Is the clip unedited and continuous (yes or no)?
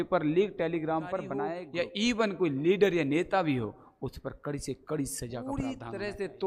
no